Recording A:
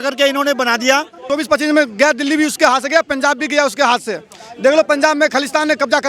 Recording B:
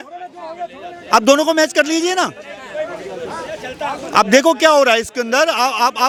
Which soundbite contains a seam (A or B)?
A